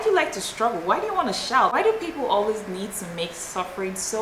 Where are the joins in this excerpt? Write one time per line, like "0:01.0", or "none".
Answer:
0:01.7